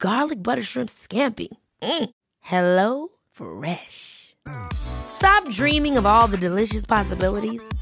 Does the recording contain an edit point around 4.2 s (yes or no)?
no